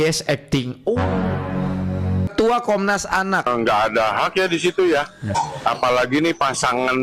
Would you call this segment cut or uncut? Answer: cut